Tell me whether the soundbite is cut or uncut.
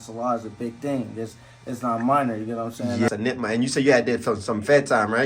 cut